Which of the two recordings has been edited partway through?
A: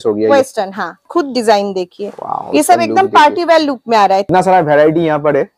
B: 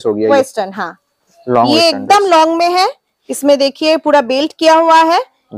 A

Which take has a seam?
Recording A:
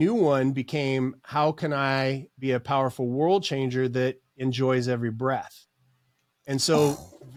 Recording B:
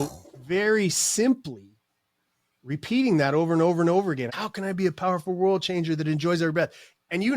B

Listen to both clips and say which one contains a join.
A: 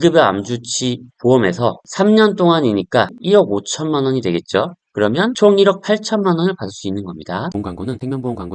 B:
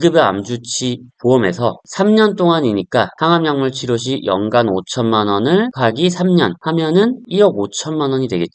A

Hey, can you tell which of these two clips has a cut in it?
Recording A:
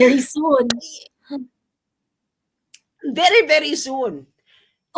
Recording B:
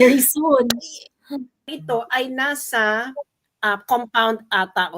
B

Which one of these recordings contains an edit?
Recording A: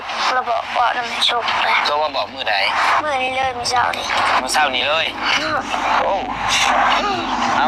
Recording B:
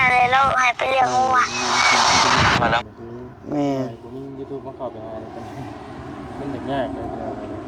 B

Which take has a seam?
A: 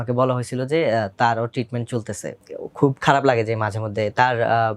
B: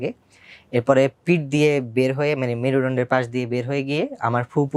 A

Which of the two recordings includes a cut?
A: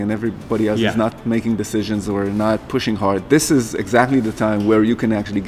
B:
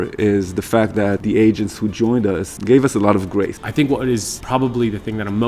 B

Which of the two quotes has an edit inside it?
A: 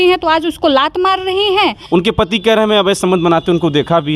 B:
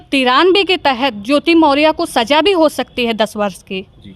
A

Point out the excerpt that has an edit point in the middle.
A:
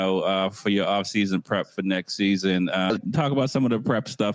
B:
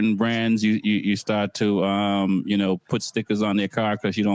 A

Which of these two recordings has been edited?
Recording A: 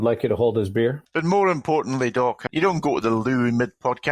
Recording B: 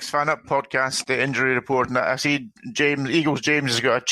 A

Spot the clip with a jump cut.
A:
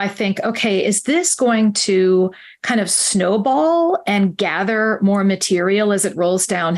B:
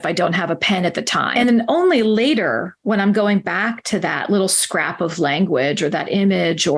B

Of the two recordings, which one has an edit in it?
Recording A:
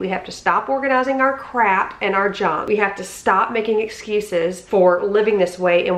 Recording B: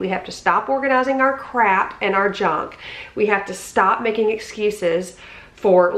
A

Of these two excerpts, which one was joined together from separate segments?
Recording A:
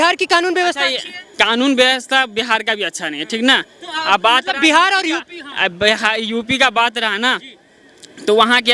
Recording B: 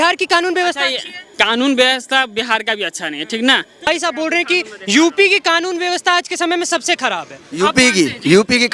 B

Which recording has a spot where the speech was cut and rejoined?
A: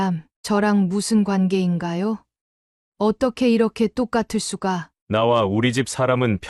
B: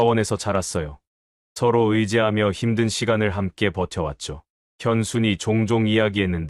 A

